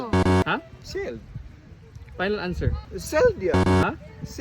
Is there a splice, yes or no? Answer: yes